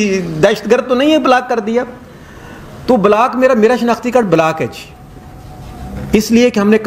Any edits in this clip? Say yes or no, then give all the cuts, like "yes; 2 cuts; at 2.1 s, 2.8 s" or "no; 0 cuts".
no; 0 cuts